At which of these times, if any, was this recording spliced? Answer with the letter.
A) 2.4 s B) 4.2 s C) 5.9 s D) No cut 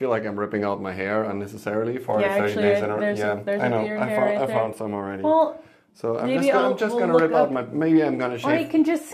D